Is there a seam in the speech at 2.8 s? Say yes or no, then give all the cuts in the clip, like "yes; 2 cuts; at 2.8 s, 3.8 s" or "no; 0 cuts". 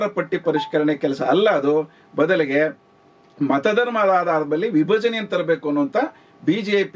no; 0 cuts